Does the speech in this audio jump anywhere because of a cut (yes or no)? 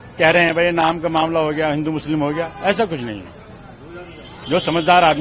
no